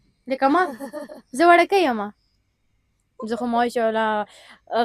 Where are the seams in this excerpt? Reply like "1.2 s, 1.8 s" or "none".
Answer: none